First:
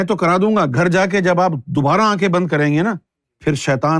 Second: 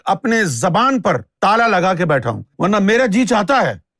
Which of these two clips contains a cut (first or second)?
second